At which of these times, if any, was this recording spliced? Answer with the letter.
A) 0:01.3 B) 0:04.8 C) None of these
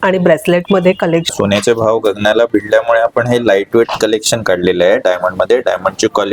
A